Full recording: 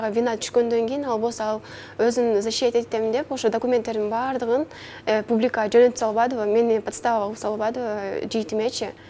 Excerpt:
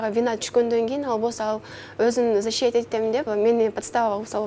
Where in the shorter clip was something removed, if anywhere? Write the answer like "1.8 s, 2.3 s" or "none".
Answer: 3.3 s